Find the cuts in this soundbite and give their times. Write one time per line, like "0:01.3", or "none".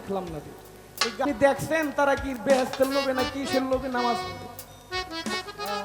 0:01.2